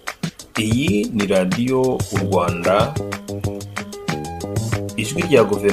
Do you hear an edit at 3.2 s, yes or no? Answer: no